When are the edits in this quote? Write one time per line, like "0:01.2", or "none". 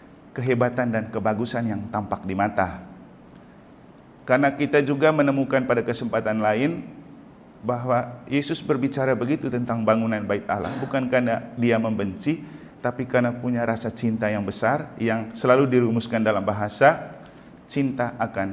none